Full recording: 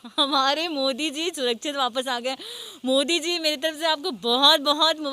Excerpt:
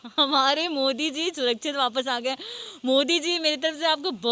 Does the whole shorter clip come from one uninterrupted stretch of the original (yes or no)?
yes